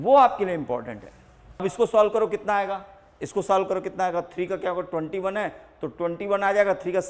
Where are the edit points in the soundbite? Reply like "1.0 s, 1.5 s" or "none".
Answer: 1.6 s